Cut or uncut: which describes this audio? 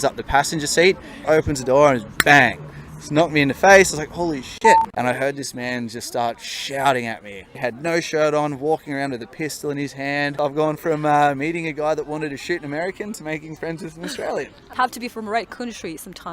cut